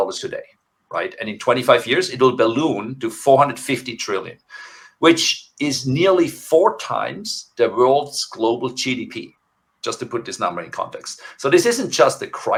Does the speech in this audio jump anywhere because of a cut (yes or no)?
no